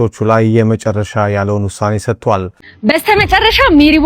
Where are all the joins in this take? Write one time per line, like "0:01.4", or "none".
0:02.5